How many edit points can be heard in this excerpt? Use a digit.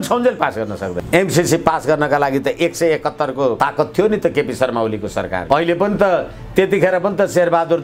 3